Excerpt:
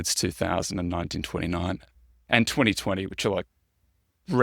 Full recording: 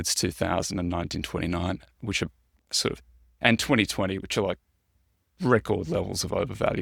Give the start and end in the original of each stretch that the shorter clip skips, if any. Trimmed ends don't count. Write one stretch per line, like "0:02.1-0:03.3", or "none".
0:01.9-0:03.1

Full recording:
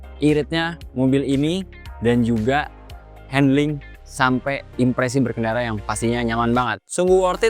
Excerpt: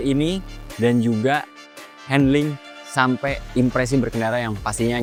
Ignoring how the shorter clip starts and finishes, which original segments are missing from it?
none

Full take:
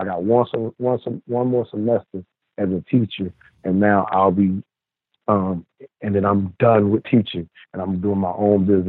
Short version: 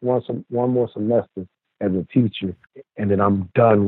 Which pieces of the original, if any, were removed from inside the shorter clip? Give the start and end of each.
0:03.5-0:05.7

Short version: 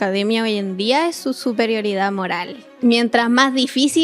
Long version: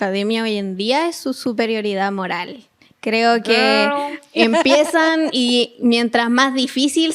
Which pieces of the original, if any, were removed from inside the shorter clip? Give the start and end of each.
0:02.7-0:05.7

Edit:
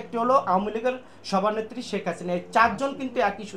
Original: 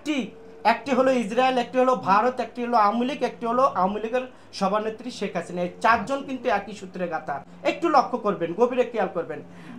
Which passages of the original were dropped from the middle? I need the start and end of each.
none

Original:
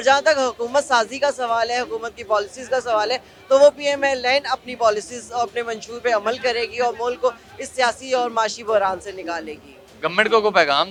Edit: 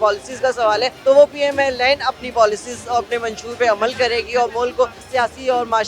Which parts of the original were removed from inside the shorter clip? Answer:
0:03.2-0:03.4
0:07.4-0:07.6

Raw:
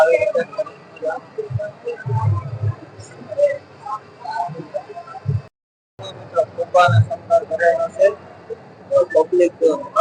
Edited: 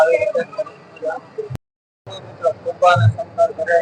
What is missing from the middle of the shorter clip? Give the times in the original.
0:01.5-0:05.4

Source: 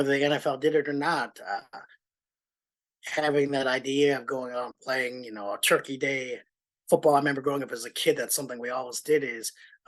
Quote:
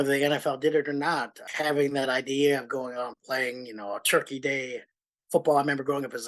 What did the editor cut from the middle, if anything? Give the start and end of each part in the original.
0:01.4-0:03.0

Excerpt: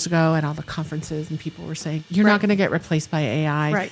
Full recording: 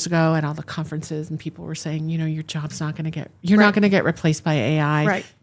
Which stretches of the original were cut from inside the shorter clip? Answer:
0:02.0-0:03.3

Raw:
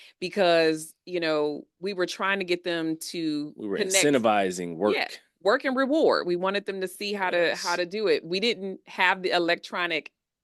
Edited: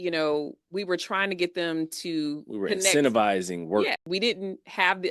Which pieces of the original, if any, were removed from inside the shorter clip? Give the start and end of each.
0:05.2-0:08.3

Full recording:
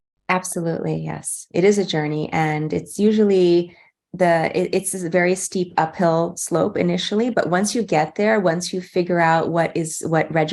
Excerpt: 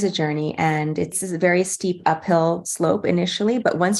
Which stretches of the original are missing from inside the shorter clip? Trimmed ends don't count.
0:02.9-0:04.9

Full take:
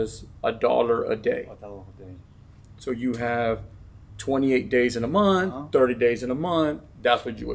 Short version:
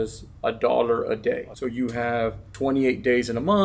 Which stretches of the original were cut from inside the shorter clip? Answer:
0:01.5-0:02.8
0:03.7-0:04.1

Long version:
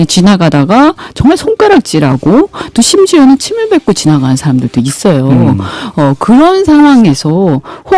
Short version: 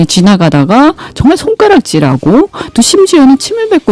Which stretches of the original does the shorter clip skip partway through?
none

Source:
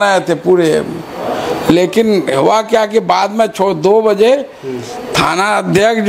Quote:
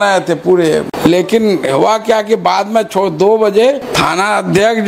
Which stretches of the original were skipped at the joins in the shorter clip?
0:00.9-0:01.6
0:04.5-0:05.1

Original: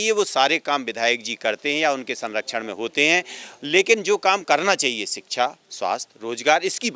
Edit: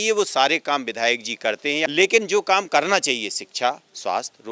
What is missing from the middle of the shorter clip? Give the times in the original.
0:01.9-0:03.6

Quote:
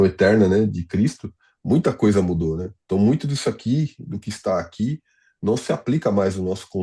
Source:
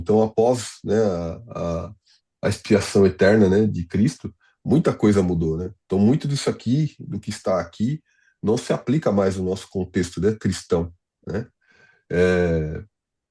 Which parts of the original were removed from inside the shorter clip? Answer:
none

